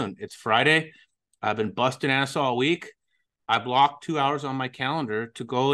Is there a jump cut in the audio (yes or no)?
no